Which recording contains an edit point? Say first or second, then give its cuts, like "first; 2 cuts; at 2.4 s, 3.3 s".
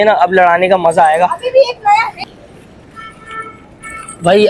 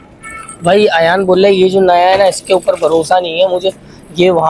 first; 1 cut; at 2.2 s